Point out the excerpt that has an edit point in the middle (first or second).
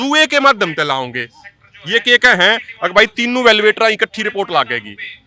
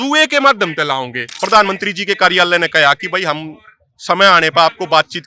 second